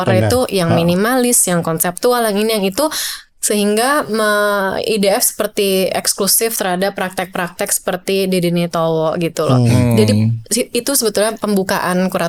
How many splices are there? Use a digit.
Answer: 0